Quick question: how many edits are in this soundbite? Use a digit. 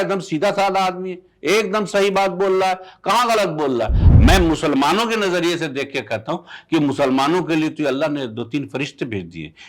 1